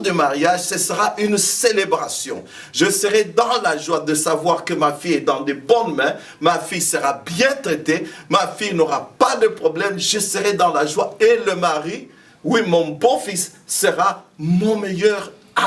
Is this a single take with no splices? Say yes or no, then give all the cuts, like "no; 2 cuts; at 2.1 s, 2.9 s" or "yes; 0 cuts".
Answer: yes; 0 cuts